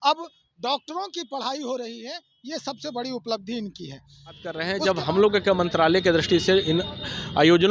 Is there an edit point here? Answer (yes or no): yes